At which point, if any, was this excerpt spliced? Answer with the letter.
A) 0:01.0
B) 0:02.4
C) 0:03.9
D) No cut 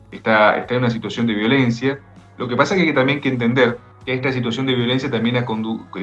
C